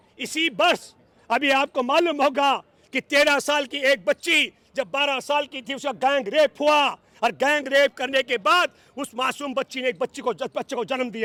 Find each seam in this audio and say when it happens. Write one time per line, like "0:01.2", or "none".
none

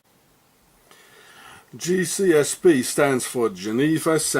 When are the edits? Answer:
0:02.9

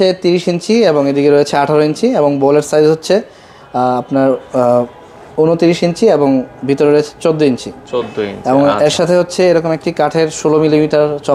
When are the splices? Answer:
none

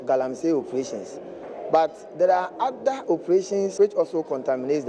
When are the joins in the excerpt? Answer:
0:03.7

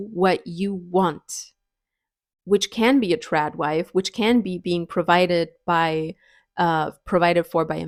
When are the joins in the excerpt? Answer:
none

